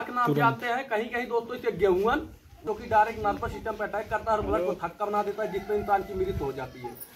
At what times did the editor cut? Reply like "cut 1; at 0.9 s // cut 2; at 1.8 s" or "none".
cut 1; at 2.6 s